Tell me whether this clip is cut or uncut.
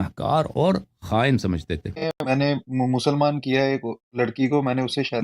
cut